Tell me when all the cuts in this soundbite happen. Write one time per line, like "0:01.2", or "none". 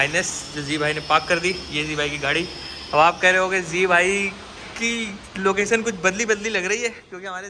none